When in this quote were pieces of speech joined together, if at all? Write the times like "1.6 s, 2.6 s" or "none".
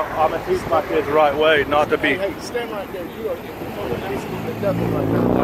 none